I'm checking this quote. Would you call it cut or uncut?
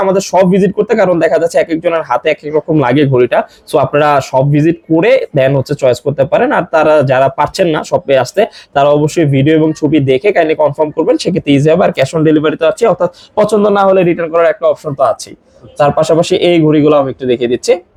uncut